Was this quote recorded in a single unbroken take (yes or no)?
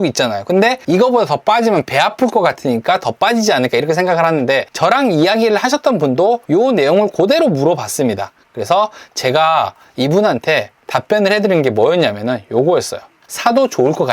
no